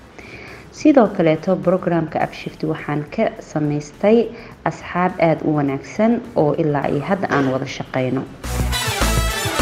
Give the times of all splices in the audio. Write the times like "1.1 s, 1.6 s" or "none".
8.5 s